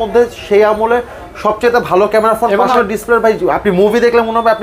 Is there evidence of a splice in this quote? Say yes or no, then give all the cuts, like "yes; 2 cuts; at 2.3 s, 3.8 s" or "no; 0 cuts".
yes; 1 cut; at 2.7 s